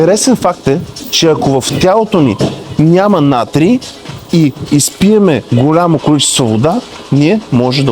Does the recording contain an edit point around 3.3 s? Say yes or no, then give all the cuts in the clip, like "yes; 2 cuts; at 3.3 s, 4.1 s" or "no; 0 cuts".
no; 0 cuts